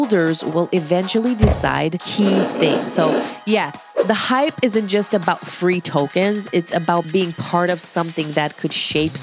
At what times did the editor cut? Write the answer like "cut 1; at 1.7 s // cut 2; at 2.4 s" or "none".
cut 1; at 2.9 s